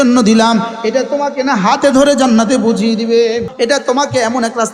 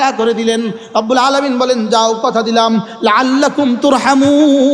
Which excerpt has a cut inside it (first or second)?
first